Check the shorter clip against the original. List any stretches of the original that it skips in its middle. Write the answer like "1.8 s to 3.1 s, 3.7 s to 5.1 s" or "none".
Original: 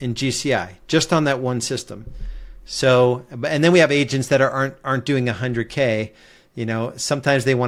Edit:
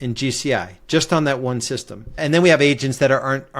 2.1 s to 3.4 s